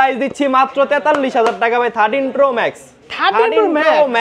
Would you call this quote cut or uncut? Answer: uncut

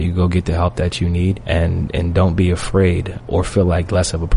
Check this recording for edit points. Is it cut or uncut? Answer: cut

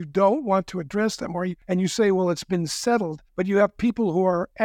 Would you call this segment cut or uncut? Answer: cut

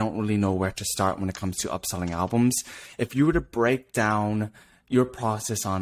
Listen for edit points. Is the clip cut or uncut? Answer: uncut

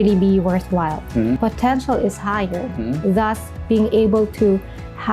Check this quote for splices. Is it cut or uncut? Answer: cut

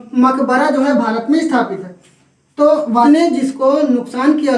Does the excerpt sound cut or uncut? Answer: cut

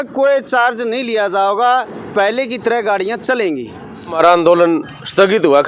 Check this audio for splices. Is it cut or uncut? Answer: cut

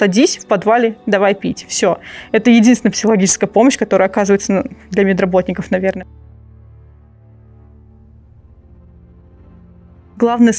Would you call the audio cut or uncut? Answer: uncut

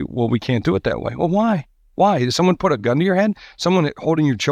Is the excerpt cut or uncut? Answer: uncut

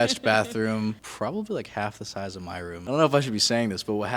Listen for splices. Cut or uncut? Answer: cut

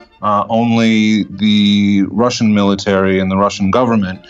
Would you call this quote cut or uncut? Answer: uncut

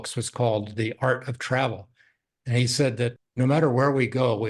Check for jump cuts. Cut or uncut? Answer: cut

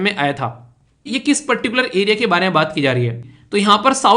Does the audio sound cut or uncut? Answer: cut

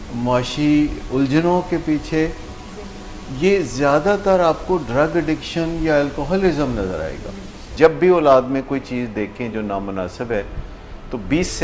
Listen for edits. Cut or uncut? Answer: cut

